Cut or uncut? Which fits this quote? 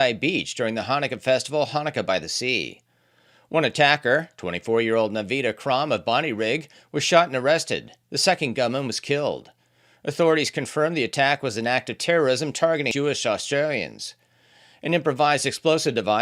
cut